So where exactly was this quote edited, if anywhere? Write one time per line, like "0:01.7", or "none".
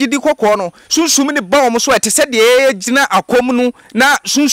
none